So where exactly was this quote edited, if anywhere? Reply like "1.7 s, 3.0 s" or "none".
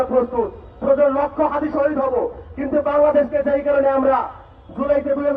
none

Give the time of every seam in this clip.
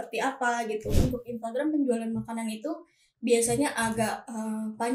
1.0 s

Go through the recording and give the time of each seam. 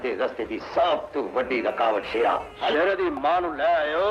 2.7 s

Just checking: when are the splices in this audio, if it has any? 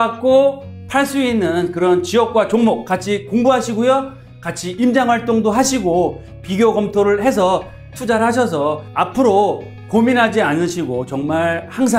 none

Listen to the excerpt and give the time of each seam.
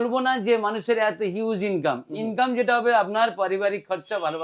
none

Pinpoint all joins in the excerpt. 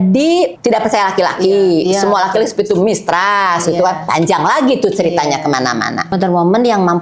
6.1 s

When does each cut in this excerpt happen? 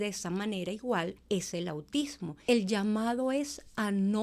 1.2 s, 2.3 s

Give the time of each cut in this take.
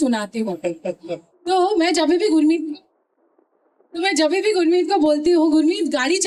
none

